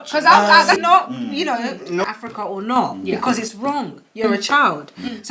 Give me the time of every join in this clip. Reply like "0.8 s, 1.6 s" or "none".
0.8 s, 2.1 s